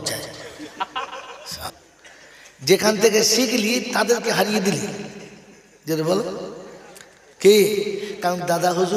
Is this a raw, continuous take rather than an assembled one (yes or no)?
no